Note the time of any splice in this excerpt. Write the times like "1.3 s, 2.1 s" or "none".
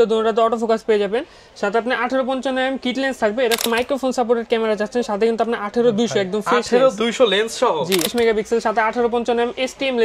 3.6 s, 8.1 s